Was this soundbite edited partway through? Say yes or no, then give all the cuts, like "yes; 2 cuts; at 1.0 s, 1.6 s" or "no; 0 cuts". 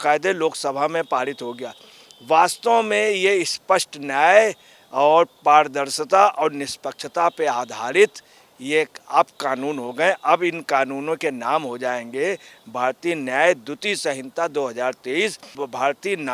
no; 0 cuts